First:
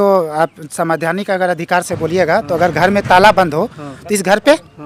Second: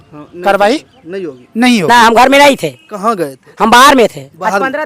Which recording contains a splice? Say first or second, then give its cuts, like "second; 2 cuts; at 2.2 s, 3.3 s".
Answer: second; 1 cut; at 1.9 s